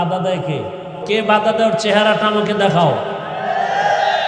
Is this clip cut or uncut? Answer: cut